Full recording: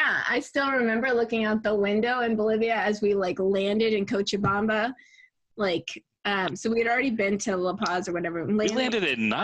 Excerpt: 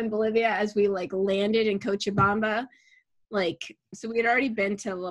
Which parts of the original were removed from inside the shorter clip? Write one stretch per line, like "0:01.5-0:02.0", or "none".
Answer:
0:06.2-0:06.5